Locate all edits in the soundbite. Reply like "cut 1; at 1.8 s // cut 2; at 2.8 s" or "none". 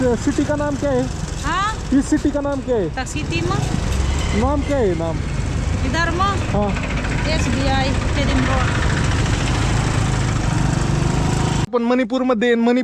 cut 1; at 11.7 s